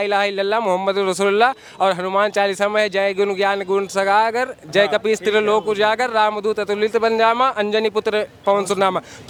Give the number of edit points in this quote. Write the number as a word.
zero